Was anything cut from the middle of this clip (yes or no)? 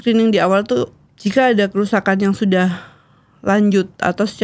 yes